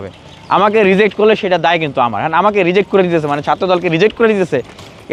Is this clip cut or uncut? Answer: uncut